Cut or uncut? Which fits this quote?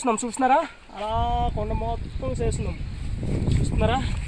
uncut